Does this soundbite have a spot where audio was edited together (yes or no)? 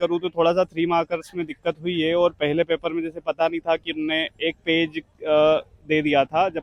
no